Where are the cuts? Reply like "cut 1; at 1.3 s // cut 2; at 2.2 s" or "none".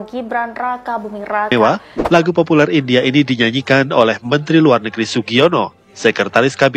cut 1; at 1.5 s